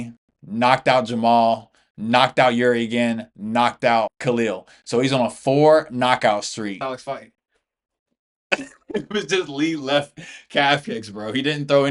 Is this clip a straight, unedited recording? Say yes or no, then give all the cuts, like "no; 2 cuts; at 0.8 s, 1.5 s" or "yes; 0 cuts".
no; 2 cuts; at 4.2 s, 6.8 s